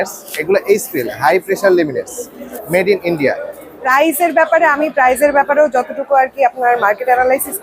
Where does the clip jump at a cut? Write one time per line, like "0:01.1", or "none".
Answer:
0:02.6
0:03.8